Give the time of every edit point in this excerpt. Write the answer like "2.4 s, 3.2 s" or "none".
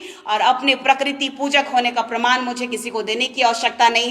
none